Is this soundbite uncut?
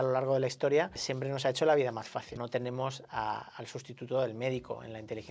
no; 2 cuts; at 1.1 s, 2.3 s

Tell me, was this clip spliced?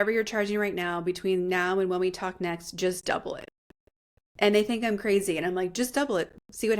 no; 0 cuts

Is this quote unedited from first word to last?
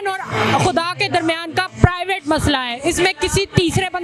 yes; 0 cuts

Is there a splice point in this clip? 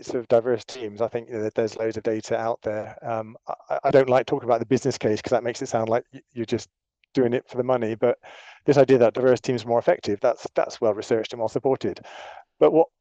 no; 0 cuts

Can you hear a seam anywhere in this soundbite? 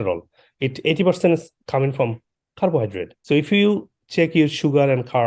yes; 1 cut; at 3.1 s

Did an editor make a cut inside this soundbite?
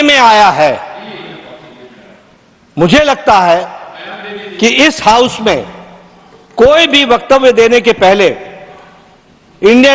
no; 0 cuts

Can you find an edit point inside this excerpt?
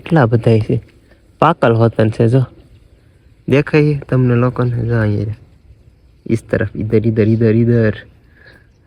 no; 0 cuts

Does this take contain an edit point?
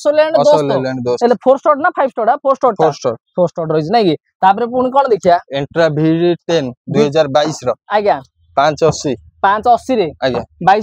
no; 0 cuts

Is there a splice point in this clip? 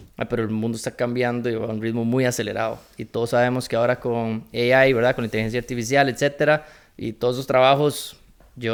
no; 0 cuts

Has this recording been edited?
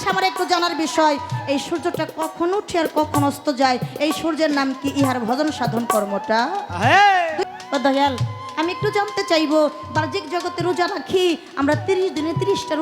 yes; 1 cut; at 7.5 s

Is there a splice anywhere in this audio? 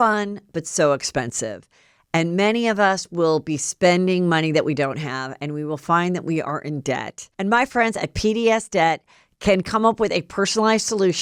no; 0 cuts

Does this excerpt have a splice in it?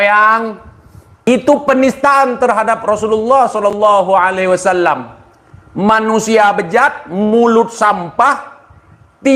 yes; 1 cut; at 1.0 s

